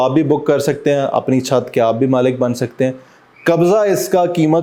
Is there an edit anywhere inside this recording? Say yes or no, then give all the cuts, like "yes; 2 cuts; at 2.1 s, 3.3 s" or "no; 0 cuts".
no; 0 cuts